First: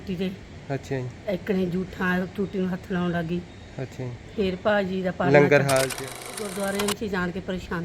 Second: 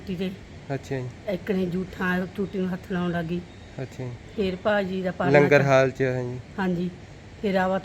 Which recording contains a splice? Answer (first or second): first